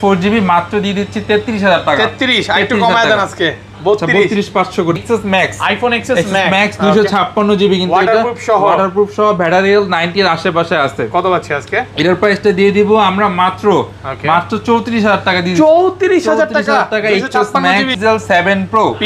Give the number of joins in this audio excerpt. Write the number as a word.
two